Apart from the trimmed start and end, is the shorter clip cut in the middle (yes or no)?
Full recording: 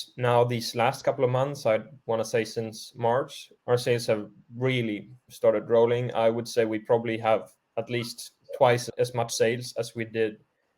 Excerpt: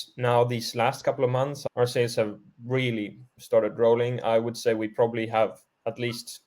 yes